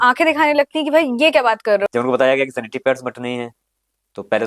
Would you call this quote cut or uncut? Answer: cut